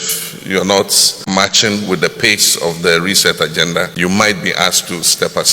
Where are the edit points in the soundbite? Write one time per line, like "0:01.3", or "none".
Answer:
0:01.2
0:03.9